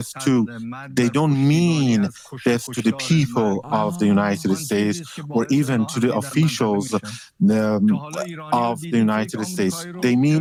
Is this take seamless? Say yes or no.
yes